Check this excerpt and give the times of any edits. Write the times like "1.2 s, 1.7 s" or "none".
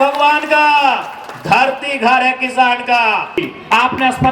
3.4 s